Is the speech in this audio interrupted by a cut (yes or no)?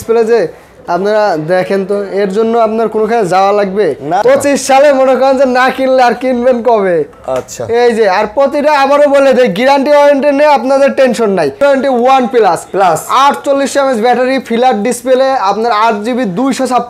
yes